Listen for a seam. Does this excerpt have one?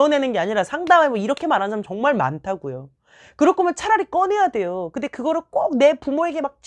no; 0 cuts

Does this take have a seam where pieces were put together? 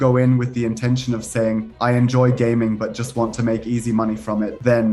no; 0 cuts

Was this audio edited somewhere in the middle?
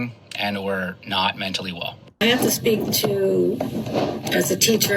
yes; 1 cut; at 2.0 s

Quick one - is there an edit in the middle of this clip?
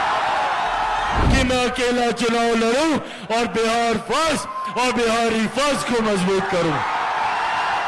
yes; 1 cut; at 1.2 s

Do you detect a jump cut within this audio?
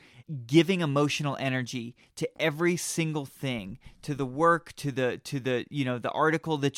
no; 0 cuts

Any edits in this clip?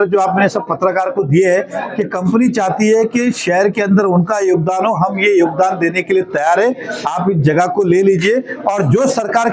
no; 0 cuts

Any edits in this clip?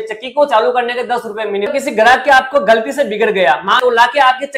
yes; 2 cuts; at 1.7 s, 3.8 s

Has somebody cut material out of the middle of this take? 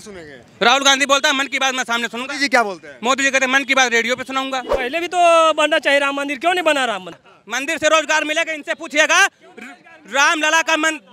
yes; 2 cuts; at 4.8 s, 7.3 s

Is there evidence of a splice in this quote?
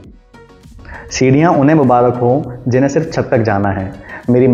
no; 0 cuts

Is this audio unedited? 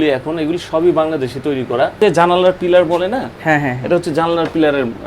no; 1 cut; at 2.0 s

